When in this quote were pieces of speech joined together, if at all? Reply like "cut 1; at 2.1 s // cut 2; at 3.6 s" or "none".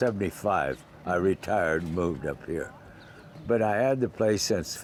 none